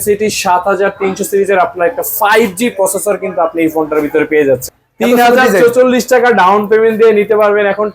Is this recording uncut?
no; 1 cut; at 4.7 s

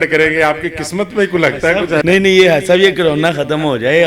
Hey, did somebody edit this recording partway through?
yes; 1 cut; at 2.0 s

